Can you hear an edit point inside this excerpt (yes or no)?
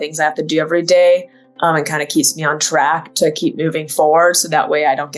no